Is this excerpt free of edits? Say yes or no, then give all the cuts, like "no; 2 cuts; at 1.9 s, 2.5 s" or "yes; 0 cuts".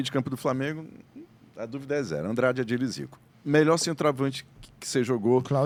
yes; 0 cuts